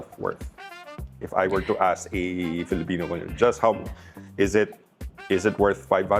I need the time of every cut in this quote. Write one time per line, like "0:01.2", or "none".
none